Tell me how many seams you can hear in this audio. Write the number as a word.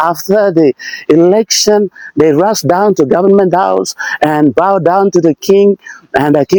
zero